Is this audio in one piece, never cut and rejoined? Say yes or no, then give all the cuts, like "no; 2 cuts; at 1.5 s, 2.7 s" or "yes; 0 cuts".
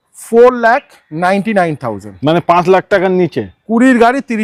yes; 0 cuts